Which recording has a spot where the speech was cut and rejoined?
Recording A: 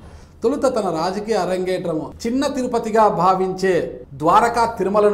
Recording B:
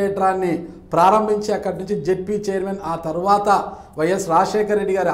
A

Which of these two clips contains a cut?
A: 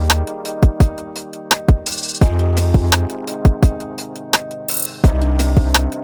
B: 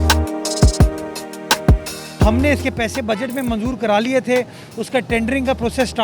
B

